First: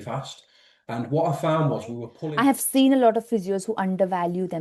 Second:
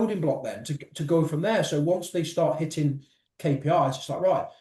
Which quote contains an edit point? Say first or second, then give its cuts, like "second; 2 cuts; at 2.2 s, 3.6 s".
first; 1 cut; at 2.1 s